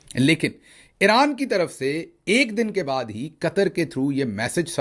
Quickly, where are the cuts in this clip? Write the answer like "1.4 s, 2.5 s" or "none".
none